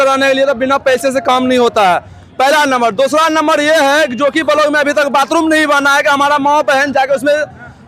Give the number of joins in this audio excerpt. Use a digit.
0